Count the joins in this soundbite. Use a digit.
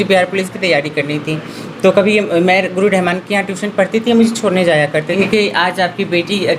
1